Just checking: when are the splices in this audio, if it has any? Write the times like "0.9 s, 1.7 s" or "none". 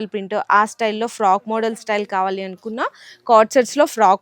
none